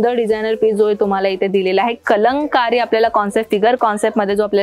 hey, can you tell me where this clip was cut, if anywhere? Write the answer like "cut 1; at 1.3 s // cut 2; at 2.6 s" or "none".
none